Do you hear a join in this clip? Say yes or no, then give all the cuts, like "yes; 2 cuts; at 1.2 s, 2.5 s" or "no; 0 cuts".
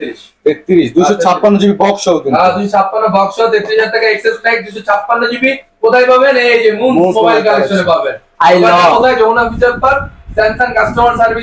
no; 0 cuts